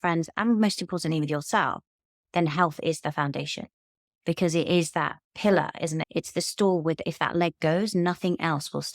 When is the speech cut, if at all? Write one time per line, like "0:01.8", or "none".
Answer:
0:06.0